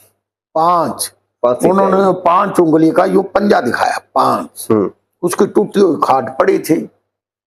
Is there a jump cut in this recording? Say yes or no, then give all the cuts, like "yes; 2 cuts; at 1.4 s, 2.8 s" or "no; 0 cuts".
yes; 1 cut; at 5.0 s